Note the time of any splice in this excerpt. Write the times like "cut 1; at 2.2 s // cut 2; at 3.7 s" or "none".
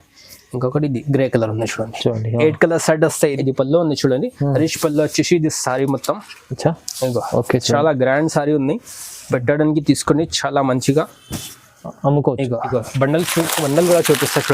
cut 1; at 3.3 s // cut 2; at 12.7 s